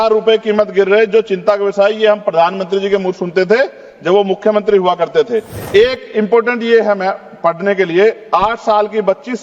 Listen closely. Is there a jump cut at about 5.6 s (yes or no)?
yes